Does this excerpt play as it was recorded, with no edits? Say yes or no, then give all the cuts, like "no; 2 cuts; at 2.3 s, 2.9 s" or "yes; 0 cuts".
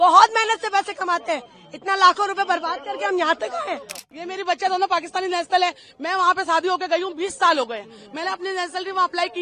no; 1 cut; at 4.1 s